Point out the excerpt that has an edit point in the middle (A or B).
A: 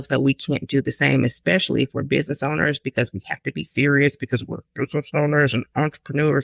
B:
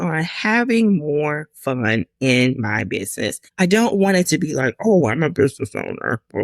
B